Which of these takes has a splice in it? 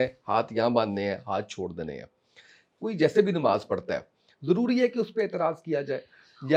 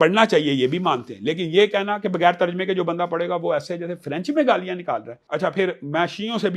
second; 1 cut; at 5.1 s

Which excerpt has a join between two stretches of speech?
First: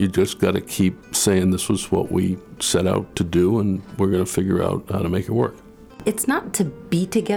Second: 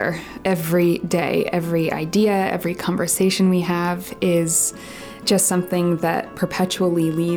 first; 2 cuts; at 1.1 s, 6.0 s

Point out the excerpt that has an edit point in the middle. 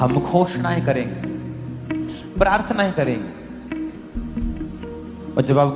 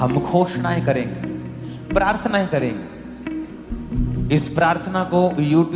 second; 2 cuts; at 1.7 s, 3.9 s

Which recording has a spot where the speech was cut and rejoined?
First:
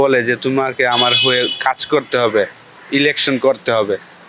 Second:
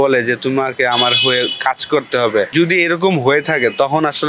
second; 1 cut; at 2.5 s

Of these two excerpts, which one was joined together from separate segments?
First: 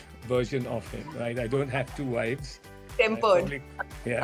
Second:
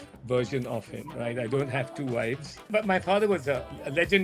second; 1 cut; at 2.7 s

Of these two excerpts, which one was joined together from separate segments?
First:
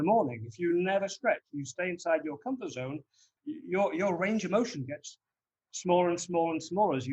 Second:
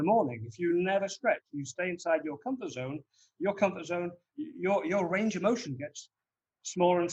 first; 1 cut; at 3.3 s

